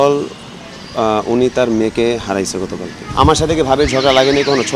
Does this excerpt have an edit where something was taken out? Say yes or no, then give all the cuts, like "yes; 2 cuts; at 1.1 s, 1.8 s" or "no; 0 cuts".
yes; 1 cut; at 3.3 s